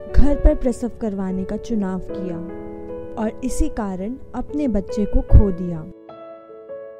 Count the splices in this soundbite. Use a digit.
1